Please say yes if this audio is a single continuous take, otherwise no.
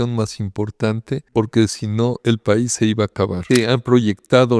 no